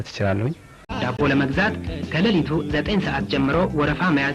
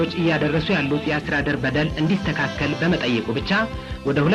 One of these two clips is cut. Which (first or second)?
first